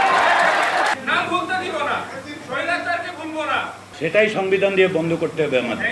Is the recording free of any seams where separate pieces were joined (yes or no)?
no